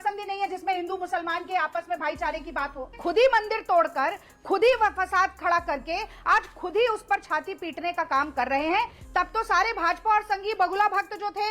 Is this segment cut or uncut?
cut